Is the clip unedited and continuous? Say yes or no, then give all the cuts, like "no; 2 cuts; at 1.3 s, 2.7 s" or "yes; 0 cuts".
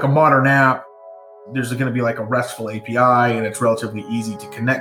no; 1 cut; at 1.1 s